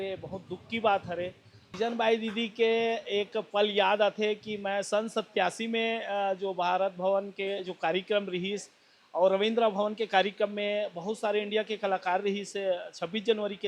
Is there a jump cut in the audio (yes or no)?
yes